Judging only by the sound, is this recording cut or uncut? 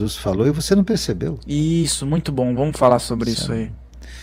uncut